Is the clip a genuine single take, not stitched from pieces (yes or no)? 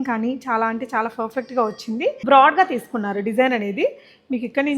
no